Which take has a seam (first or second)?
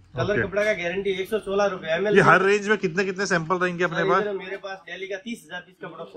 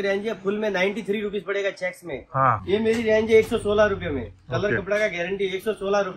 second